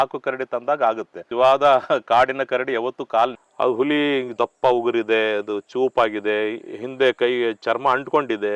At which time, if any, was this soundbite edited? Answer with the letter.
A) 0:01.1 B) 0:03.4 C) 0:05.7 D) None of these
B